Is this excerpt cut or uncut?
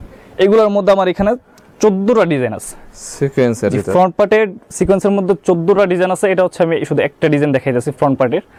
uncut